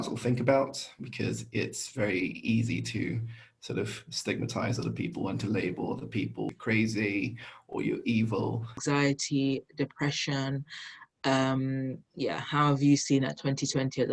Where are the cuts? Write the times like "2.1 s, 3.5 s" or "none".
6.5 s, 8.8 s